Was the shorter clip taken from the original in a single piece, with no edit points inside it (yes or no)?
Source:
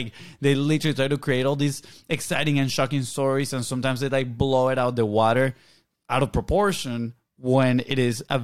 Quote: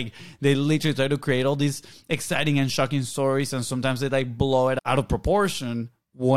no